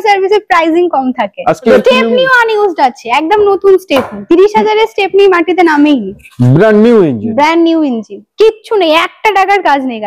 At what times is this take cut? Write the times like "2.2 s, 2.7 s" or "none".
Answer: 1.7 s